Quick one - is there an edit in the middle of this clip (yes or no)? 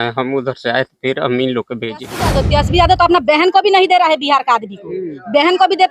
yes